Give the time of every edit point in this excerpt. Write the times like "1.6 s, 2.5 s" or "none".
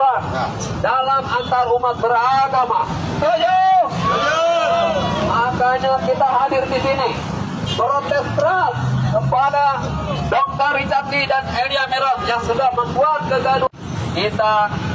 none